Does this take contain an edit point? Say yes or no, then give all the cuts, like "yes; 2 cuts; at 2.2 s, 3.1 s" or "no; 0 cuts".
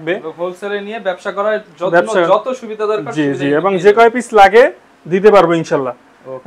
no; 0 cuts